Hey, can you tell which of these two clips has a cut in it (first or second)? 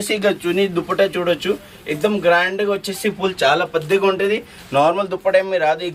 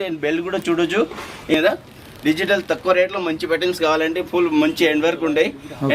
second